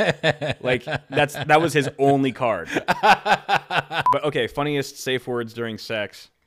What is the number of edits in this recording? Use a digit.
1